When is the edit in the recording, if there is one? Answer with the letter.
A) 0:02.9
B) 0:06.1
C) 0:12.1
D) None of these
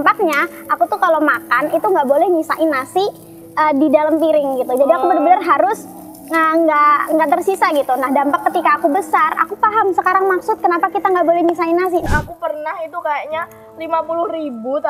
C